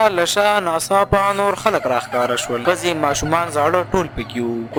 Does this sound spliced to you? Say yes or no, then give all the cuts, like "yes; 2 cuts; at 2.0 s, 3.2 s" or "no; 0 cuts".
no; 0 cuts